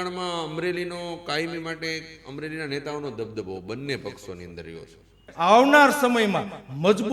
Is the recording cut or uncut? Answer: cut